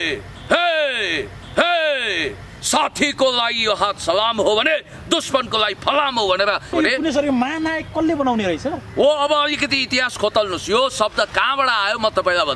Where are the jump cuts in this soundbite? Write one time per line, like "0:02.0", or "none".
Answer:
0:01.4
0:06.7